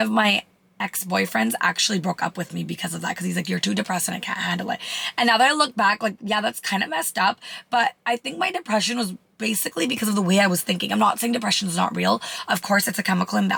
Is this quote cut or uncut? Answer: uncut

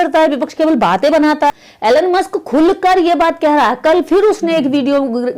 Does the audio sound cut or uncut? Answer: cut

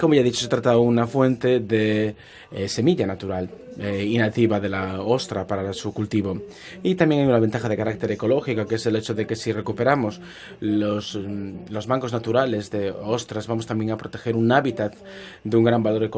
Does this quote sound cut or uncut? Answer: cut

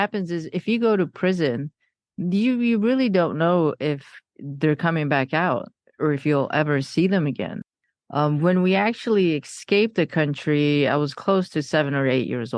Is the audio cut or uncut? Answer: cut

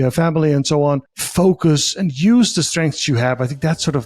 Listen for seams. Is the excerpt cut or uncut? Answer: cut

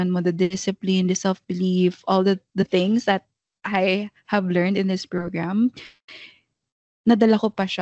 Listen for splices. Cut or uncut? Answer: uncut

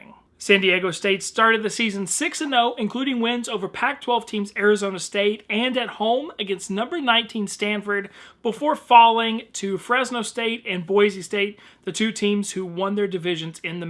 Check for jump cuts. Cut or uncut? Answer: cut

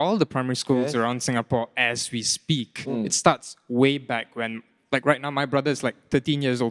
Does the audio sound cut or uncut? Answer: cut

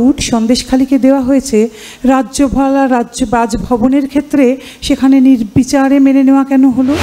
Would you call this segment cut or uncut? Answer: uncut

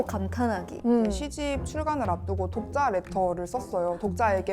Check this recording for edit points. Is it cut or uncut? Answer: cut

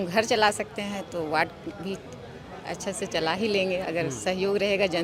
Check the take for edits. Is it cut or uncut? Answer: uncut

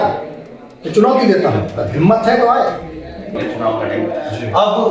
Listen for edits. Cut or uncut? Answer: cut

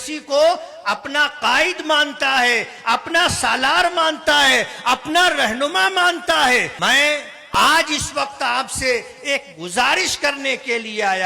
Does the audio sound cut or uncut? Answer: cut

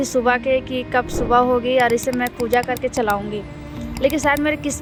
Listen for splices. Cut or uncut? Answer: uncut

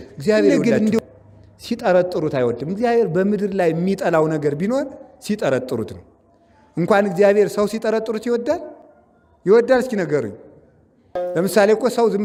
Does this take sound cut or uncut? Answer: uncut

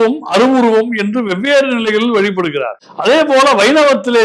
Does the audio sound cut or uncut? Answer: cut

